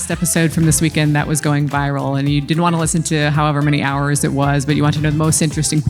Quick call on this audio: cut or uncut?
uncut